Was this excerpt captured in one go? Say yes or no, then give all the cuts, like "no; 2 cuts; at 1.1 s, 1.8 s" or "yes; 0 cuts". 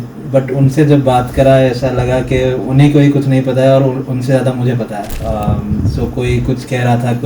no; 1 cut; at 5.1 s